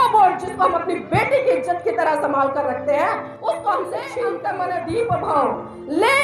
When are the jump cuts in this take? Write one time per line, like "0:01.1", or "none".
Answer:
0:04.4

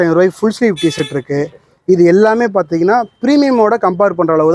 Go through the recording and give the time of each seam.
none

